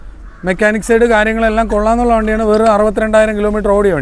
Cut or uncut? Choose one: uncut